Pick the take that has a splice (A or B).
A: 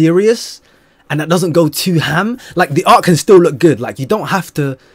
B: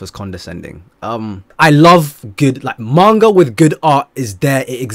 B